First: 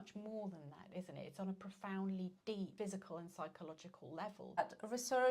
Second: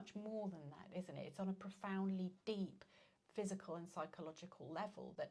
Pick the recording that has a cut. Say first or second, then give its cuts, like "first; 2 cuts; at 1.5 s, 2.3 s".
first; 2 cuts; at 2.7 s, 4.6 s